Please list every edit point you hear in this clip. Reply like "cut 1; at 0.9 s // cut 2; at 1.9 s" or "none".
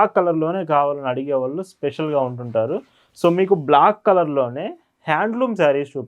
none

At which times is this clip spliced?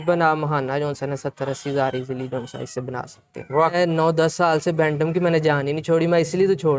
cut 1; at 3.7 s

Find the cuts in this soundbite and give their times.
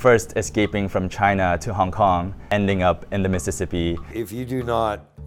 cut 1; at 2.5 s // cut 2; at 4.1 s

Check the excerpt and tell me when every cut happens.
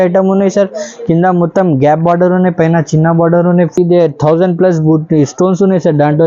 cut 1; at 3.8 s

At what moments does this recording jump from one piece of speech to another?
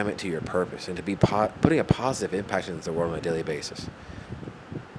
none

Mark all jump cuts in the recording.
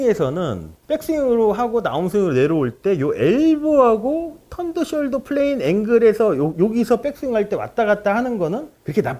cut 1; at 6.5 s

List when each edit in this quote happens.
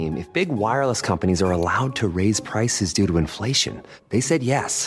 none

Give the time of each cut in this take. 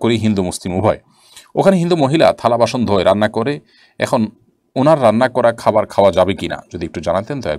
none

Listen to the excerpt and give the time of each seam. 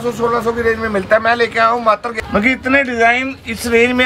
cut 1; at 2.1 s

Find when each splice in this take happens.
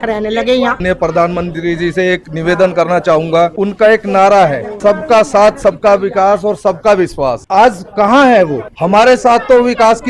cut 1; at 0.8 s // cut 2; at 3.5 s // cut 3; at 4.7 s // cut 4; at 7.4 s // cut 5; at 8.7 s

